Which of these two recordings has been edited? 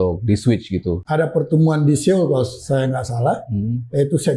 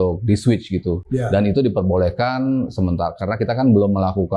first; 1 cut; at 1.0 s

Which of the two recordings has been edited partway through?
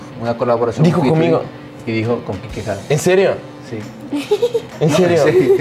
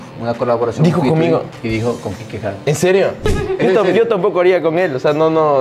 second; 2 cuts; at 1.5 s, 3.6 s

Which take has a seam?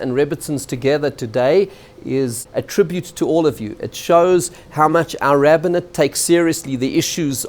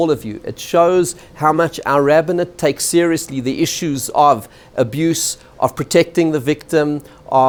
first; 1 cut; at 2.4 s

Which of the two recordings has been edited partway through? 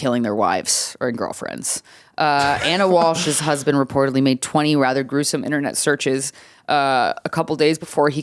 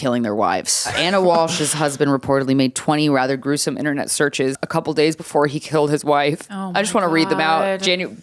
second; 2 cuts; at 0.9 s, 4.6 s

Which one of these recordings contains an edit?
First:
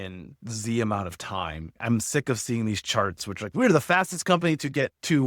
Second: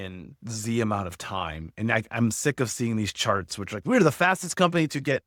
first; 1 cut; at 1.8 s

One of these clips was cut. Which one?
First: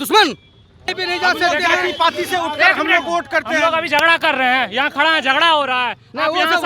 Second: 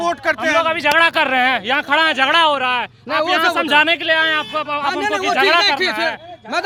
first; 1 cut; at 0.9 s

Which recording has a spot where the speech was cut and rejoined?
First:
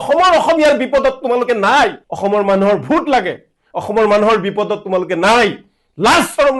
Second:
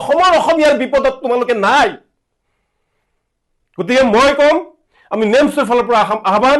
first; 1 cut; at 2.1 s

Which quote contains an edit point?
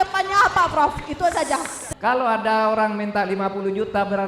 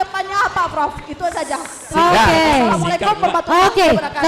first; 1 cut; at 1.8 s

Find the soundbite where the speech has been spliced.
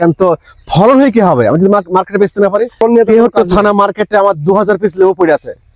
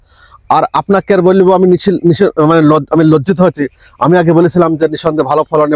first; 1 cut; at 2.8 s

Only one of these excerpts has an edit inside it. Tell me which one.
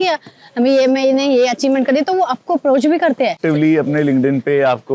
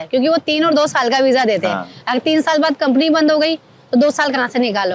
first; 1 cut; at 3.4 s

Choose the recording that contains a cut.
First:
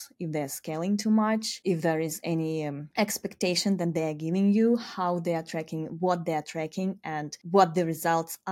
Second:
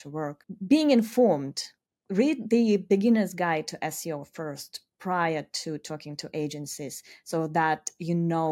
first; 3 cuts; at 1.5 s, 2.8 s, 7.3 s

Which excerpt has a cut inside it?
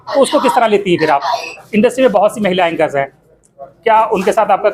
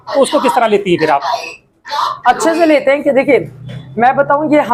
first; 1 cut; at 1.6 s

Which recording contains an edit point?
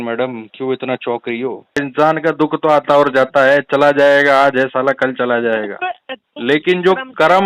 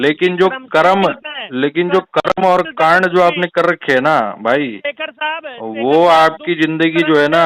first; 1 cut; at 1.8 s

